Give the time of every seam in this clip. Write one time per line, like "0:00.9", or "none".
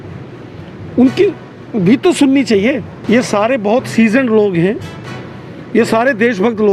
0:02.9